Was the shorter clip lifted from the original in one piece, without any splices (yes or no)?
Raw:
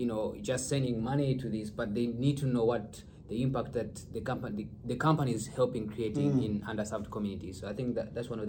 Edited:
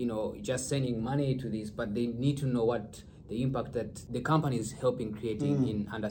no